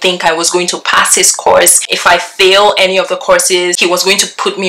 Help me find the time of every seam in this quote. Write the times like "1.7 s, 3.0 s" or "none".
1.9 s, 3.8 s